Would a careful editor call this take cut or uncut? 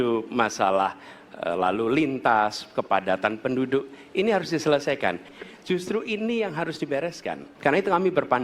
cut